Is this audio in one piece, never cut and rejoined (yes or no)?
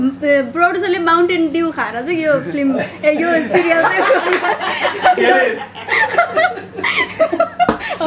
yes